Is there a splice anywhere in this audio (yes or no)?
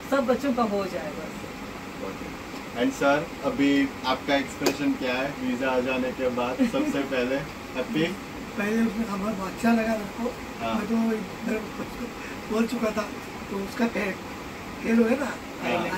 no